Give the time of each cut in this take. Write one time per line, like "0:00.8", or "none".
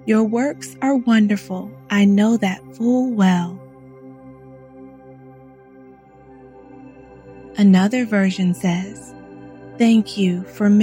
0:03.6
0:07.5